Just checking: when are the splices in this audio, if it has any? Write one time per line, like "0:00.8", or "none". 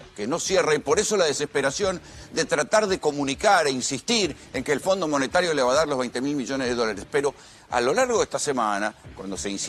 none